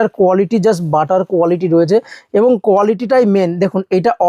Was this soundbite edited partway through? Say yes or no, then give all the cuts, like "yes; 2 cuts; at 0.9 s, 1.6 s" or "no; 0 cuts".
no; 0 cuts